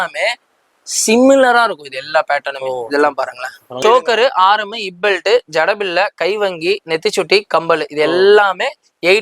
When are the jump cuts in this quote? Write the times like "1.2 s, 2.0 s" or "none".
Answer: 3.7 s